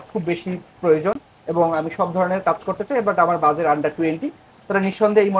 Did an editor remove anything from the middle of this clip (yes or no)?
no